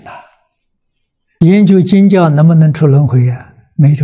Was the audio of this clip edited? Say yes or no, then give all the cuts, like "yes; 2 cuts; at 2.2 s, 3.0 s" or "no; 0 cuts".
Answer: yes; 1 cut; at 1.3 s